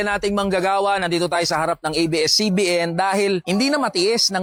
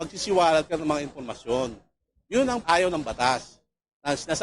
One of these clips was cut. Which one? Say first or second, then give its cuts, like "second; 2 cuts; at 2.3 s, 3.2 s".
second; 1 cut; at 2.6 s